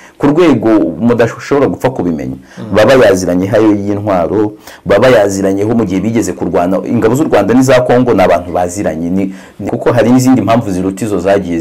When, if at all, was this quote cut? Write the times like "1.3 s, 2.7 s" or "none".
9.6 s